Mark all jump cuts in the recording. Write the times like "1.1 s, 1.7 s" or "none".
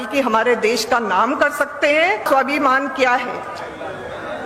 2.2 s